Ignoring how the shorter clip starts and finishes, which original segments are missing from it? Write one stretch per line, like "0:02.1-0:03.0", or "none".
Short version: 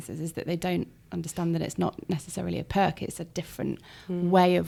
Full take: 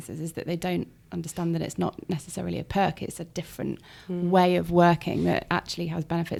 none